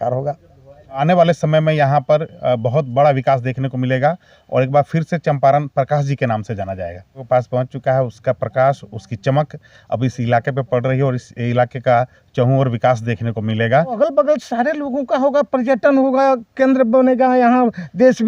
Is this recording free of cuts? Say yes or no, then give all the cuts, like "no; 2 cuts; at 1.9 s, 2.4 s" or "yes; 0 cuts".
no; 3 cuts; at 1.0 s, 7.2 s, 14.0 s